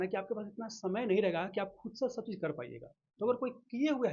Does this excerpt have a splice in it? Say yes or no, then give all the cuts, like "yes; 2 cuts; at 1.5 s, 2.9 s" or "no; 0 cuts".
no; 0 cuts